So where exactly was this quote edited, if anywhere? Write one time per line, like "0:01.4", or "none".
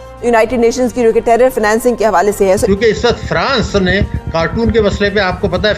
0:02.6